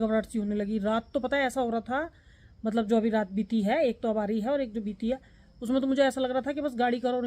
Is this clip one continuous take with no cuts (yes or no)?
yes